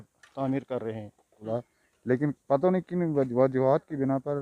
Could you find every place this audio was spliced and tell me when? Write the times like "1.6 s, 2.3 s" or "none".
1.5 s